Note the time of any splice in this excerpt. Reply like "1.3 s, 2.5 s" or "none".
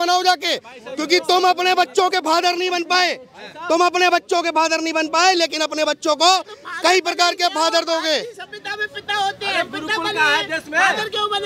none